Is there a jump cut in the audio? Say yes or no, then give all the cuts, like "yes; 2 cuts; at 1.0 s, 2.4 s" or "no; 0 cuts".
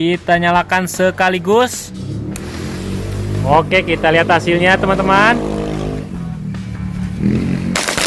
yes; 2 cuts; at 2.1 s, 3.4 s